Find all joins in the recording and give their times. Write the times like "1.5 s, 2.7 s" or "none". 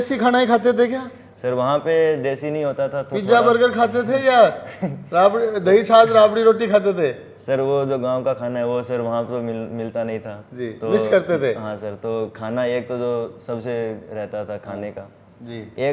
none